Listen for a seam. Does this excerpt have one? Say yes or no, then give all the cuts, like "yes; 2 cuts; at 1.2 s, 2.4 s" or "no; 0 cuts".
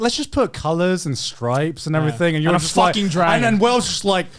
no; 0 cuts